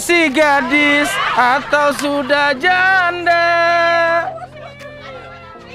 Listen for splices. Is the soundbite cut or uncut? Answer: uncut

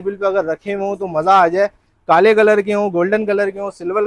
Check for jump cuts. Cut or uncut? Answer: uncut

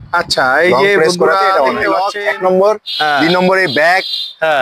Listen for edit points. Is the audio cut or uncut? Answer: cut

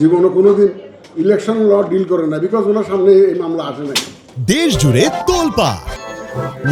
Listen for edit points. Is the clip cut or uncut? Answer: uncut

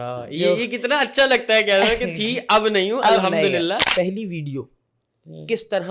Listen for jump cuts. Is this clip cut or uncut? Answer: cut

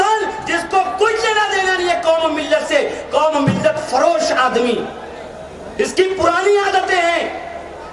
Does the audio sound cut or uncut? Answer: uncut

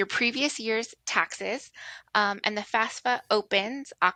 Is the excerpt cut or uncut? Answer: uncut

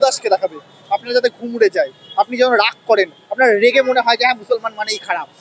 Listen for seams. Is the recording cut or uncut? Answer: uncut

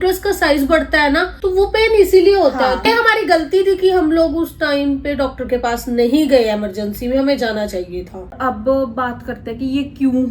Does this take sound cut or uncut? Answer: cut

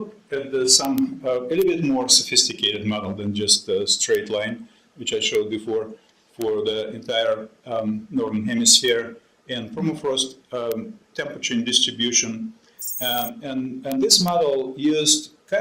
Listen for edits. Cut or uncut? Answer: uncut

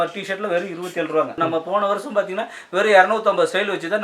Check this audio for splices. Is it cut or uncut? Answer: cut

